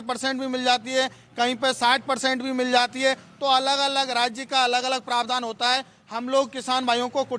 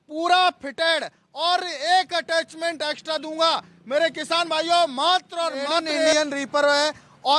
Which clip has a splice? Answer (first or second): second